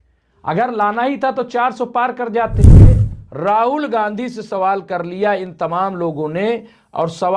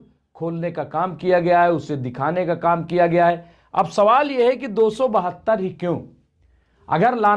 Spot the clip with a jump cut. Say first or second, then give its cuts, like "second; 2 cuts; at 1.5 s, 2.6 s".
first; 2 cuts; at 2.6 s, 3.1 s